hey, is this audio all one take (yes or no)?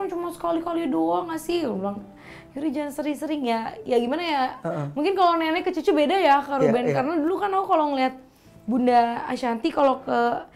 yes